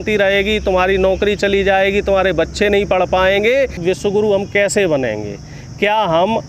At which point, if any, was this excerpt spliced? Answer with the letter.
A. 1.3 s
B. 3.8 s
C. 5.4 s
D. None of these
B